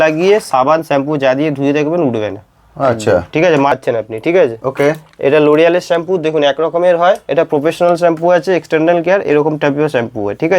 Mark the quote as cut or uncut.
cut